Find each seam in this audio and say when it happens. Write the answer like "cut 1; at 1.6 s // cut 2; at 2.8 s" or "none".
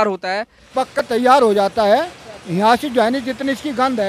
cut 1; at 0.9 s